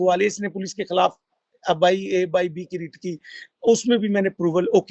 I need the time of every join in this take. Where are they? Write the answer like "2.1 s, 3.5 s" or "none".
none